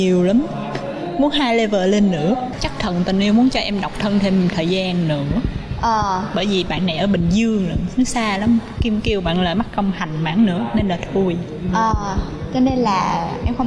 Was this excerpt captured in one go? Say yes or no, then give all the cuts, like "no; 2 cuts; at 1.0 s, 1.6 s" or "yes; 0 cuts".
yes; 0 cuts